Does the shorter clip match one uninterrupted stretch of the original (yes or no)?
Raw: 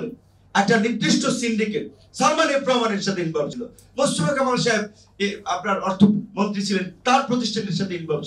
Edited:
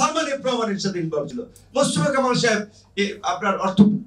yes